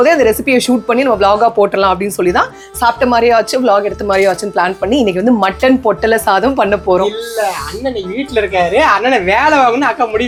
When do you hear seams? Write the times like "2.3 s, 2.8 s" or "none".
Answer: none